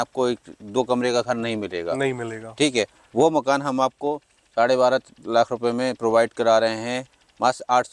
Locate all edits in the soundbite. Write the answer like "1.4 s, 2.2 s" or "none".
none